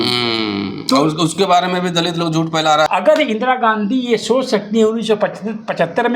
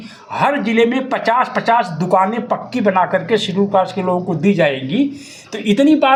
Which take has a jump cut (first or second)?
first